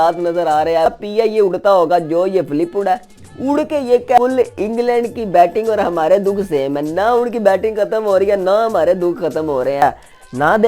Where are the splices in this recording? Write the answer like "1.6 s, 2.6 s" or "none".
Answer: 0.9 s, 4.2 s, 9.8 s